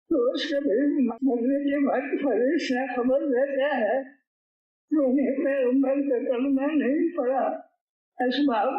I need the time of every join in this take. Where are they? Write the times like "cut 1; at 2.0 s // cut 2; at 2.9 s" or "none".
cut 1; at 1.1 s